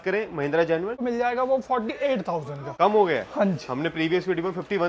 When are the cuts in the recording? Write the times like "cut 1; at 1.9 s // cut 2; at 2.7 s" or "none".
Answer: cut 1; at 1.0 s // cut 2; at 2.6 s